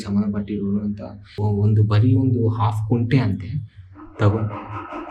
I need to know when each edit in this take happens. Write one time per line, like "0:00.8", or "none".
0:01.3